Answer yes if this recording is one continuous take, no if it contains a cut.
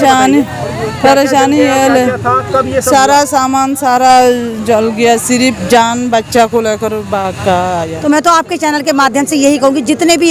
no